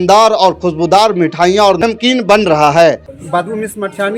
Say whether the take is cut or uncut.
cut